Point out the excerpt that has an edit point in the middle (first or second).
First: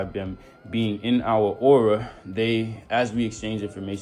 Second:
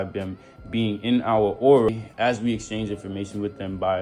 second